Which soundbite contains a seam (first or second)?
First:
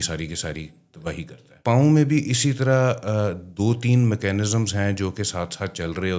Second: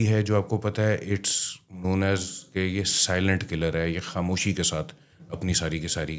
first